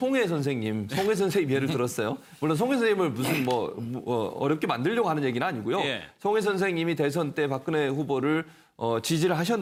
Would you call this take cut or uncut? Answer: uncut